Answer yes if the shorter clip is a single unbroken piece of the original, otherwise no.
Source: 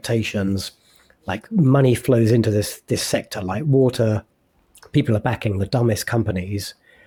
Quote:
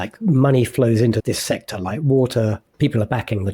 no